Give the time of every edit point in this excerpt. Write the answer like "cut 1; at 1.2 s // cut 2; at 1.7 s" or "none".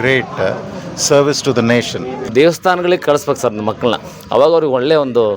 cut 1; at 2.3 s